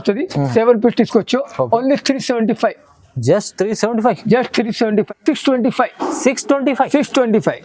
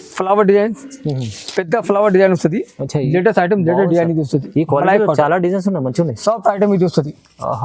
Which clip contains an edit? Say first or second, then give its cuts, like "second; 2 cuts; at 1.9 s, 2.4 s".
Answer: first; 1 cut; at 5.1 s